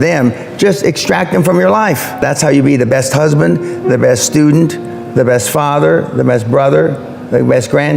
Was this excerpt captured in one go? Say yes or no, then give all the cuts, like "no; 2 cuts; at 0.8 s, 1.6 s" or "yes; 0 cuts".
no; 1 cut; at 2.2 s